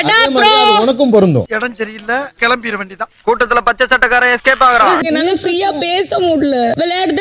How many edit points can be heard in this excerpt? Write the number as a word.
one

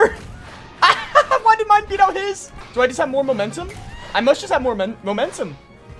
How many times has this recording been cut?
one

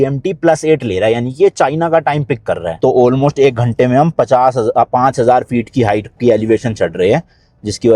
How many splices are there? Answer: one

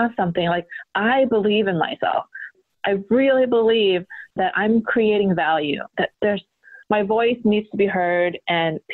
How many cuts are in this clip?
one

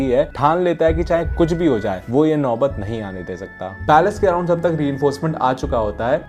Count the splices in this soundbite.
one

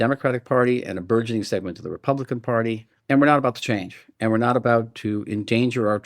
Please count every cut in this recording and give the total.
one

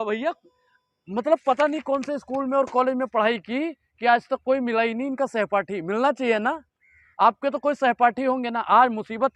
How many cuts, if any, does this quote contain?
zero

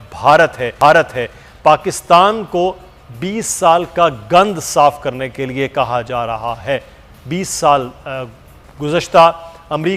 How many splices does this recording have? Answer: zero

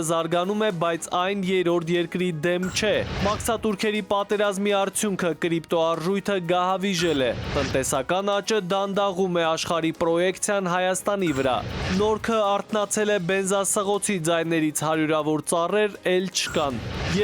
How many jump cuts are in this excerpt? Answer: one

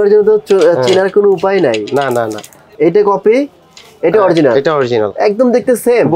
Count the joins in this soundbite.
one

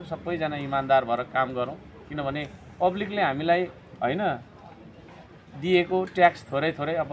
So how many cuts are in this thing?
zero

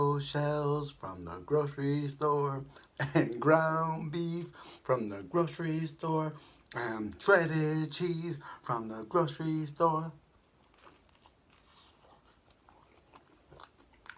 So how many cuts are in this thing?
zero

